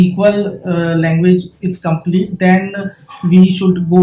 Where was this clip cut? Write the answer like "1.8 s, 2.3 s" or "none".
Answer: none